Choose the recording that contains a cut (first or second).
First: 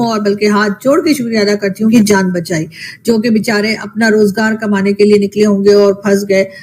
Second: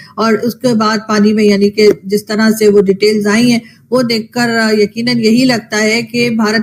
first